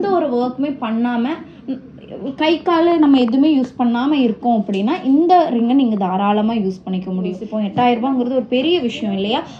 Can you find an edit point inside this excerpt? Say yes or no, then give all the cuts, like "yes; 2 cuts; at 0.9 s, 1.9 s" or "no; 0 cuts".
yes; 1 cut; at 7.4 s